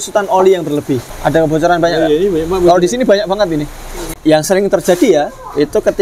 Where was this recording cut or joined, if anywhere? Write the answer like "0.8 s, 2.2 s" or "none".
1.1 s, 4.1 s